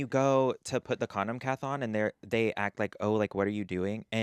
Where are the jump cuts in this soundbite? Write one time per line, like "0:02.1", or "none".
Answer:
none